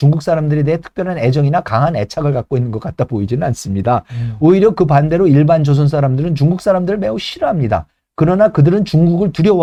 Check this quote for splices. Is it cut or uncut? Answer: uncut